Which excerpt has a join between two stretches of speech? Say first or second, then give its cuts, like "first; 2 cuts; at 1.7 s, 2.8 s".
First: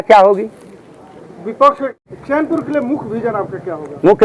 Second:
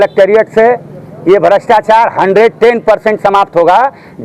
first; 1 cut; at 2.0 s